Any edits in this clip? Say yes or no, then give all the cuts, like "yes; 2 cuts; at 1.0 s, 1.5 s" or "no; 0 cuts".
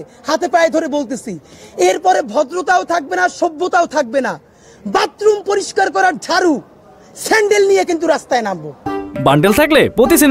no; 0 cuts